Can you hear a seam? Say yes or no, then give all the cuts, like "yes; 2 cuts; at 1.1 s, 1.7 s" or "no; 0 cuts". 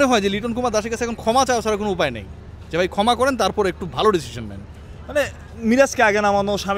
no; 0 cuts